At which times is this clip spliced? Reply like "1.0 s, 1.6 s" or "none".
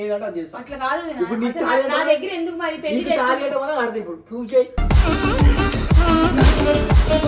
none